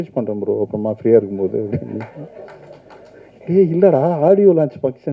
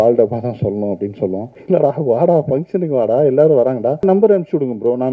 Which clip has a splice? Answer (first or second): second